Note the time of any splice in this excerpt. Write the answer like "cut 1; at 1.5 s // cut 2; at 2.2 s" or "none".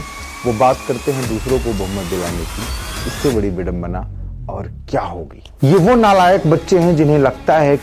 cut 1; at 5.4 s

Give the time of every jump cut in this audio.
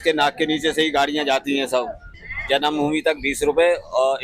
cut 1; at 2.0 s

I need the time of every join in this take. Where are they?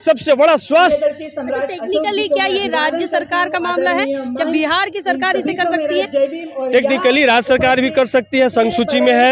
none

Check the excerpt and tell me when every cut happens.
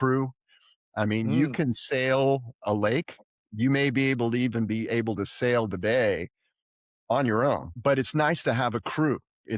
cut 1; at 7.7 s

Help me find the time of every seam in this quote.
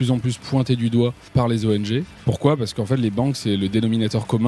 cut 1; at 1.3 s // cut 2; at 2.1 s

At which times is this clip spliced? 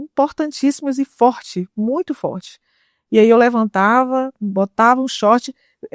none

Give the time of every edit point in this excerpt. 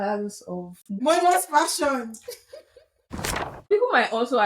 cut 1; at 1.0 s // cut 2; at 3.0 s

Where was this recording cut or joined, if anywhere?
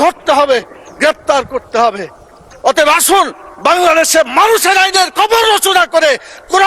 cut 1; at 2.5 s

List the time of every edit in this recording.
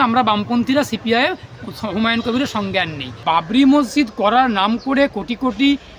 cut 1; at 3.2 s

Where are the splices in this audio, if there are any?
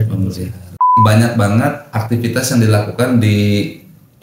cut 1; at 0.9 s

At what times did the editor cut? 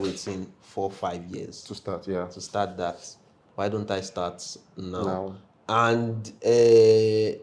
none

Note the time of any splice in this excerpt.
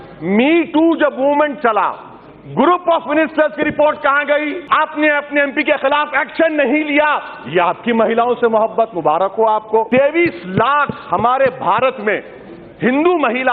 cut 1; at 4.6 s // cut 2; at 9.9 s

